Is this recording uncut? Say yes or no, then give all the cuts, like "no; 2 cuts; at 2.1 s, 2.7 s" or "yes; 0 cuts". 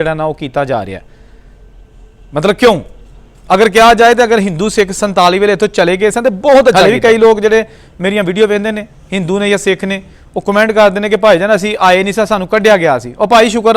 no; 1 cut; at 6.8 s